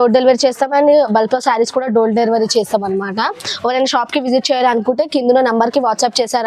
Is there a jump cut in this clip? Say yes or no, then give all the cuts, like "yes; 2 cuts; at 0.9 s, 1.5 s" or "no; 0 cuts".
no; 0 cuts